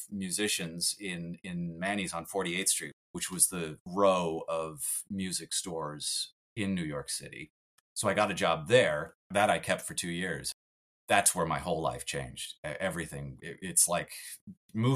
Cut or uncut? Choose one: cut